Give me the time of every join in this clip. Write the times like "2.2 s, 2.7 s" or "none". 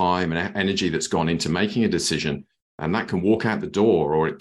none

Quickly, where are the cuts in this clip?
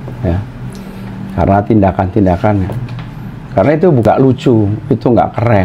4.1 s

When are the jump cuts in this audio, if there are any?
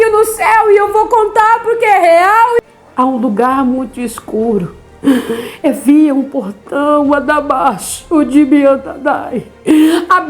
2.6 s

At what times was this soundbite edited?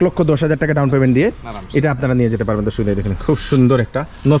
none

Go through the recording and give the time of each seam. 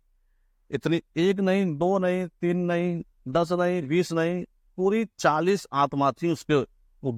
none

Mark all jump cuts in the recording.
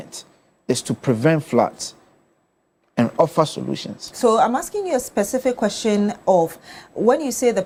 none

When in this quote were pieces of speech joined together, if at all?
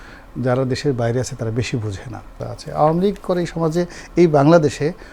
2.5 s

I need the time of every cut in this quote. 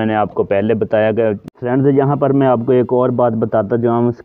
1.5 s

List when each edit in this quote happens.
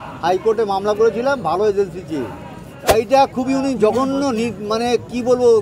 2.9 s

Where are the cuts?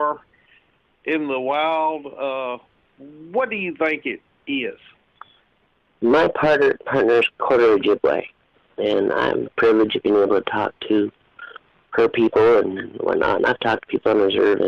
none

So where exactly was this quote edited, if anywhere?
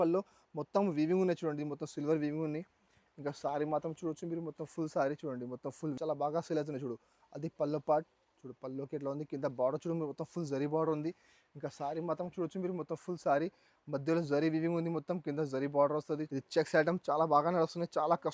6.0 s, 16.2 s

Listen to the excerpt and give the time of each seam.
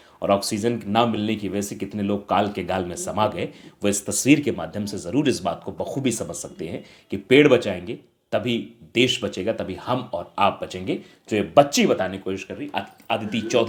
none

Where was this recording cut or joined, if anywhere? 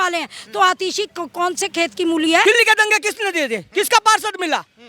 2.4 s

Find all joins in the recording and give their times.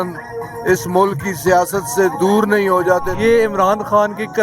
3.1 s

